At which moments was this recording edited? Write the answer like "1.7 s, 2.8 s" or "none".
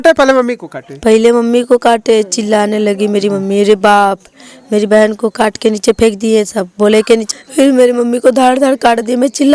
7.3 s